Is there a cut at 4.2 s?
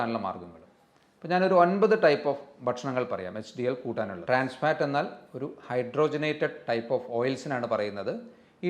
yes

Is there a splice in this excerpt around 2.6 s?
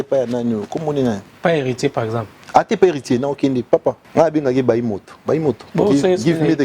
no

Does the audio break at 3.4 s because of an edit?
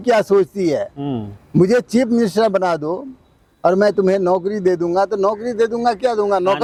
no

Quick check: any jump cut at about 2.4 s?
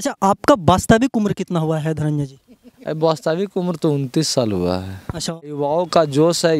no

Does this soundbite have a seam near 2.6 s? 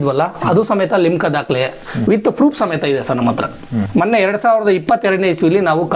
no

